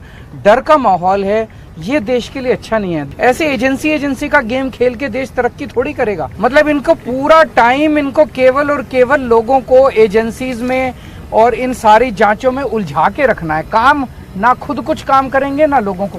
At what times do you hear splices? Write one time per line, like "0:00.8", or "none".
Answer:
0:03.1
0:06.3